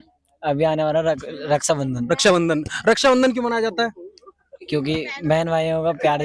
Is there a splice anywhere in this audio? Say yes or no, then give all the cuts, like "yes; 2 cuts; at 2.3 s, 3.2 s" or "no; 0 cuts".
no; 0 cuts